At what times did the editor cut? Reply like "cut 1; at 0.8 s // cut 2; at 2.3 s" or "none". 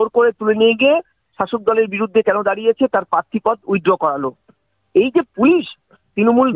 none